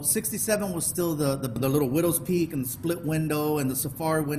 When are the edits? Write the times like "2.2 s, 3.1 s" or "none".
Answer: 1.6 s

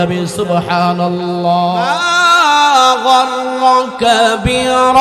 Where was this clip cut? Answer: 1.9 s

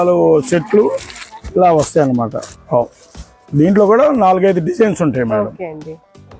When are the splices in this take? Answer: 2.6 s

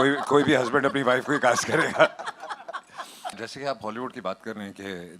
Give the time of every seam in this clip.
3.4 s

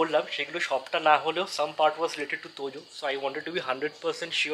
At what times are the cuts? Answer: none

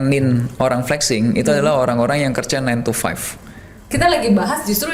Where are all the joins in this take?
3.8 s

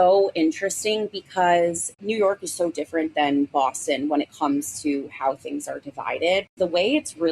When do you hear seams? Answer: 1.9 s, 6.5 s

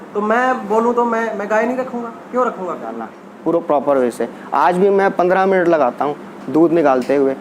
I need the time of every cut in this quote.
3.3 s

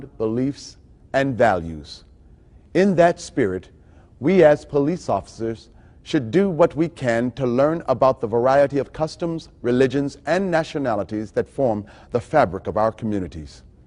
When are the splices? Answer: 5.3 s

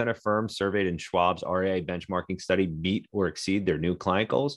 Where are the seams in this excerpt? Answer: none

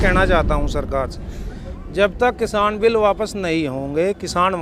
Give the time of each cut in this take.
none

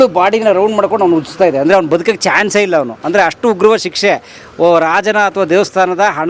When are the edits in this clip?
none

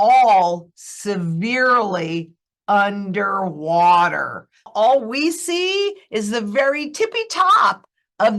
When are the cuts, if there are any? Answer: 4.7 s

